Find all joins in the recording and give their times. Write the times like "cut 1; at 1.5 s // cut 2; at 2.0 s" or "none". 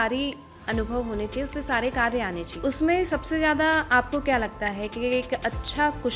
cut 1; at 2.5 s